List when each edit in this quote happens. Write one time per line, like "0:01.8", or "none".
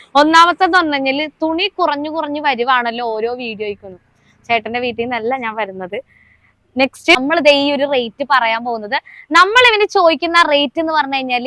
0:07.2